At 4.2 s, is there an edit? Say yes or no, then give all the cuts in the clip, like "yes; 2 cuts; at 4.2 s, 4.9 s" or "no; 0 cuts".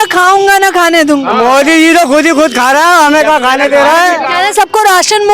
yes; 1 cut; at 4.2 s